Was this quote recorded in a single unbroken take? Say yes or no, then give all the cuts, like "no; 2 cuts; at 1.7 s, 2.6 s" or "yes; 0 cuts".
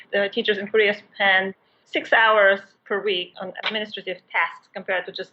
no; 1 cut; at 3.3 s